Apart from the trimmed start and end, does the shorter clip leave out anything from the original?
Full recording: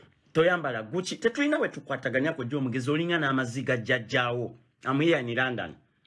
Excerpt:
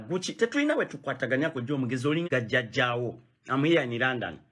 yes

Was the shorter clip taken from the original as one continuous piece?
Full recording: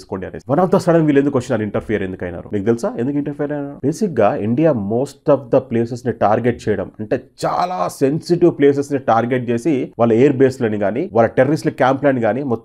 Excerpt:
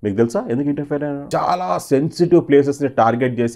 no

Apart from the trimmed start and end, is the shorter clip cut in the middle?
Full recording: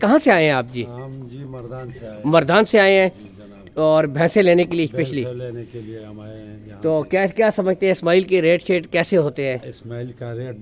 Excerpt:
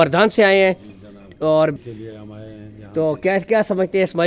yes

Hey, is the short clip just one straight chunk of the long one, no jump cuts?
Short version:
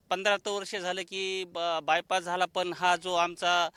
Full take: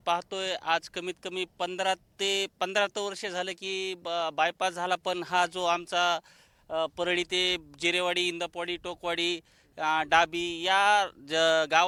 yes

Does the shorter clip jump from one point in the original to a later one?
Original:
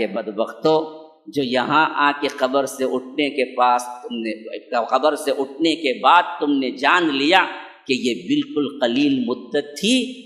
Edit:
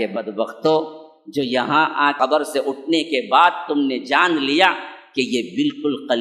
yes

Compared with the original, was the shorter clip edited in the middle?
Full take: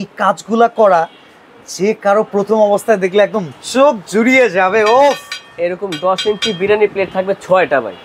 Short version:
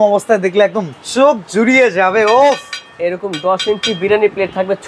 no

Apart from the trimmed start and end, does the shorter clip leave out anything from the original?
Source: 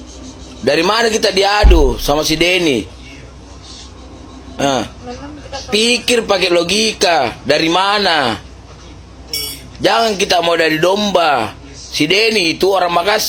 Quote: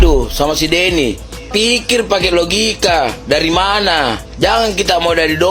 yes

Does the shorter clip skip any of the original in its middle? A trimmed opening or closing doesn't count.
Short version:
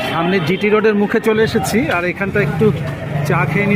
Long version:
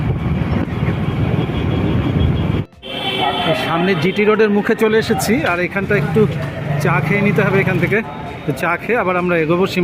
no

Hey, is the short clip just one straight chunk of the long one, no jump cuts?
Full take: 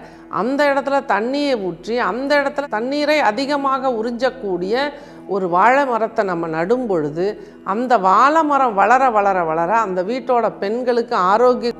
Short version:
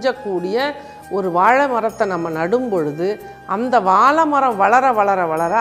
yes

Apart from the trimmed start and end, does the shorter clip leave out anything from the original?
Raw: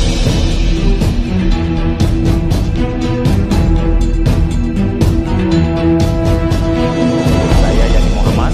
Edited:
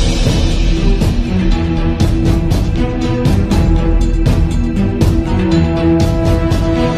no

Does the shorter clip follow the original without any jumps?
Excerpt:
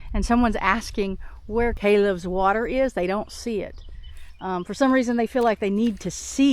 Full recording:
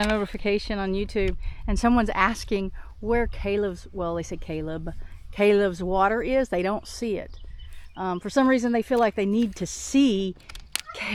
no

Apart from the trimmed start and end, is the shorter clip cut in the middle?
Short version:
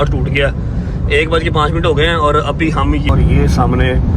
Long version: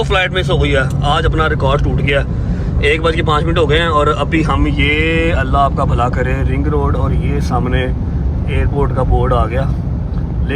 yes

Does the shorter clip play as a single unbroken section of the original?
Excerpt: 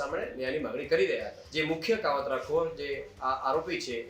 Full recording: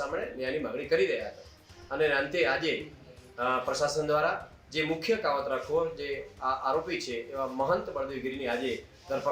no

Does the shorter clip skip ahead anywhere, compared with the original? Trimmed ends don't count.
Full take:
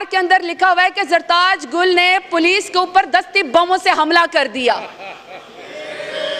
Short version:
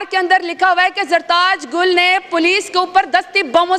no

